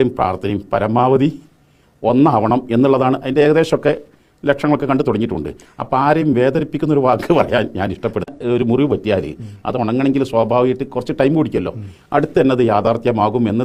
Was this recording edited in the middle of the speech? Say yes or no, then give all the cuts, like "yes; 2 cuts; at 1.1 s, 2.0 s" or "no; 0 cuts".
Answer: no; 0 cuts